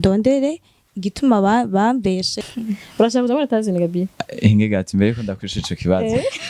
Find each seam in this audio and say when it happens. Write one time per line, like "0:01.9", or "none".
0:02.5

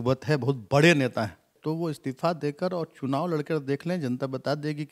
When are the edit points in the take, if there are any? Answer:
0:01.6

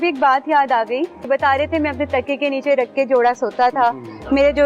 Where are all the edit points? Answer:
0:01.2

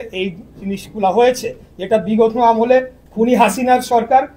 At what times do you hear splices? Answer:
none

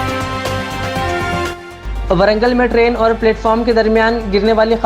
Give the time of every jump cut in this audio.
none

